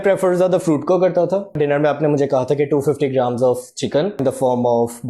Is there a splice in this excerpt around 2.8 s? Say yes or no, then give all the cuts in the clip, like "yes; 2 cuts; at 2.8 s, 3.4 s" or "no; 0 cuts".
no; 2 cuts; at 1.6 s, 4.2 s